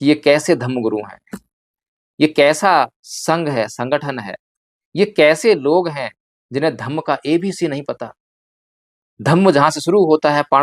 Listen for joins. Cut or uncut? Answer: uncut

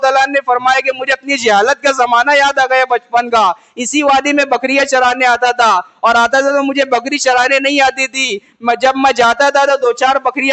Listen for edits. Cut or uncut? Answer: uncut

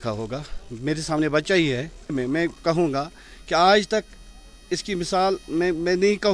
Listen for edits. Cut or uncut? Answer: cut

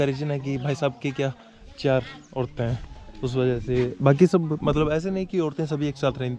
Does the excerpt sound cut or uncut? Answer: uncut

